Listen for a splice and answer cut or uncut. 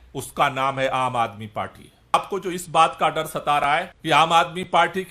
cut